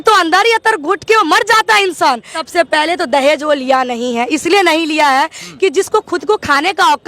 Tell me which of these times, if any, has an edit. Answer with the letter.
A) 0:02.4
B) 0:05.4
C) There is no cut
A